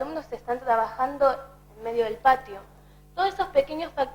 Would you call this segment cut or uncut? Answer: uncut